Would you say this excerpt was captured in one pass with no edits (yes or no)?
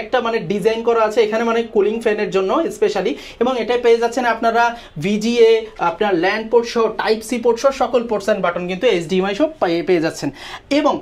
yes